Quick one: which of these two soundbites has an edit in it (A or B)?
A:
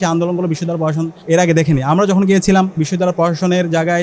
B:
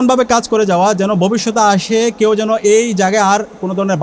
A